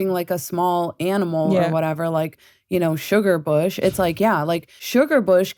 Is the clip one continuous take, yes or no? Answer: yes